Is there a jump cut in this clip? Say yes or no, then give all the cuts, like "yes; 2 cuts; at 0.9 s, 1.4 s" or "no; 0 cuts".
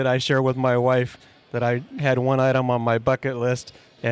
no; 0 cuts